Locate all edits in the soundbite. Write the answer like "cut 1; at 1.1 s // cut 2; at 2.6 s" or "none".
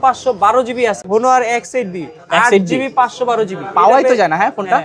cut 1; at 1.0 s